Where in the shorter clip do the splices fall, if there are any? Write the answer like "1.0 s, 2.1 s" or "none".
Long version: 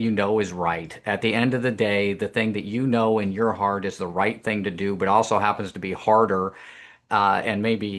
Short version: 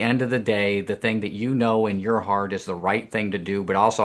none